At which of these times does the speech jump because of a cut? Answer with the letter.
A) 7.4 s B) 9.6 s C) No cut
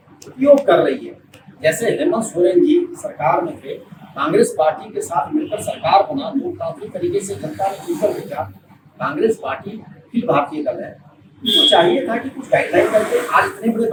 C